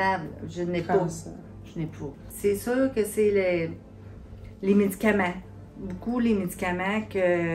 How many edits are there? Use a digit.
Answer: 1